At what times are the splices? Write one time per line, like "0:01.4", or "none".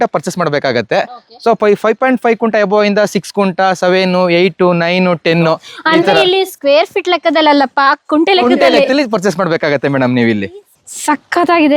0:10.8